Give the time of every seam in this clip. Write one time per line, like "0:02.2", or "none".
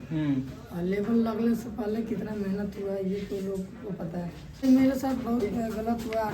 0:04.6